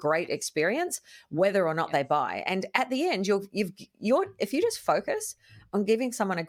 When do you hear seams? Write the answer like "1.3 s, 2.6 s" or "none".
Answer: none

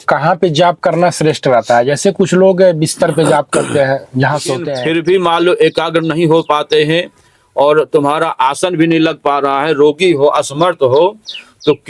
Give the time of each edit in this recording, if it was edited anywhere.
4.6 s

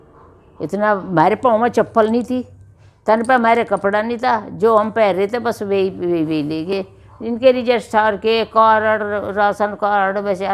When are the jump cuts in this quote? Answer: none

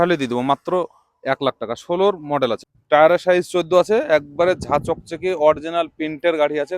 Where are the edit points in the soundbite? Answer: 2.7 s

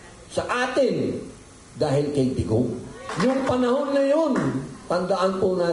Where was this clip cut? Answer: 3.0 s

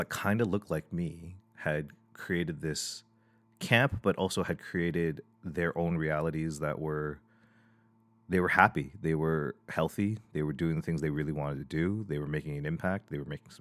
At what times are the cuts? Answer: none

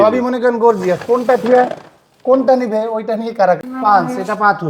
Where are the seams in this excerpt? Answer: 3.7 s

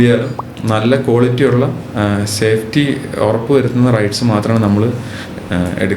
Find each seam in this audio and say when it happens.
none

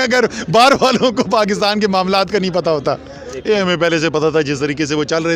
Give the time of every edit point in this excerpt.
3.2 s

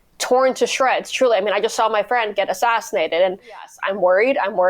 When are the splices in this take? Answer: 3.7 s

